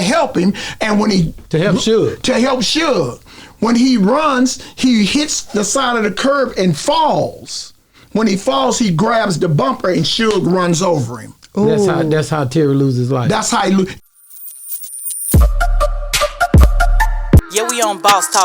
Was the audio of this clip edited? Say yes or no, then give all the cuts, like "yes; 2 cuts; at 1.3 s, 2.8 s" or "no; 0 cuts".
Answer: yes; 1 cut; at 13.9 s